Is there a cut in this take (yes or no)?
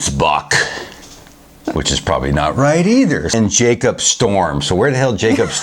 yes